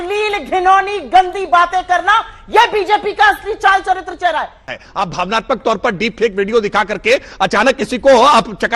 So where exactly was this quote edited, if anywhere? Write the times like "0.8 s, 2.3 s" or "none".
4.7 s

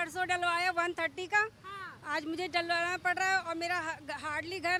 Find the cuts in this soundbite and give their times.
none

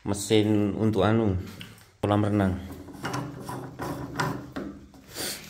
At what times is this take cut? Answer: 2.0 s

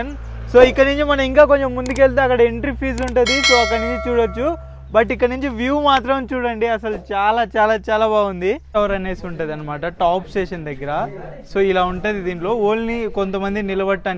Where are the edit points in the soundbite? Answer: 8.8 s

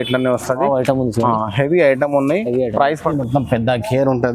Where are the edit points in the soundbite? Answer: 3.1 s

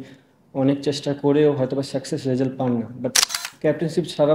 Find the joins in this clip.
3.4 s

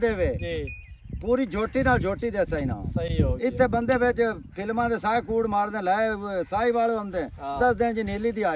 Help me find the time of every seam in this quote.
none

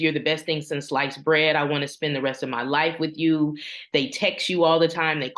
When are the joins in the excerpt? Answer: none

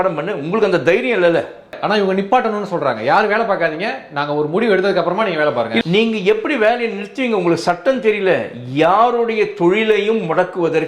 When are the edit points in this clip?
1.8 s, 5.8 s

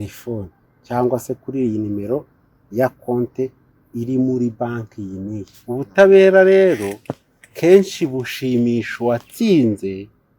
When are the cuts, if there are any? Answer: 5.5 s

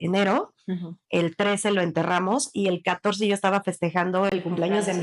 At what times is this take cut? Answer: none

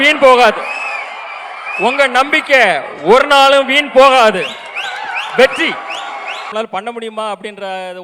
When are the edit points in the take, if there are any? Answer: 6.5 s

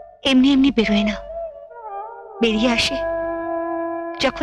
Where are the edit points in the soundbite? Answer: none

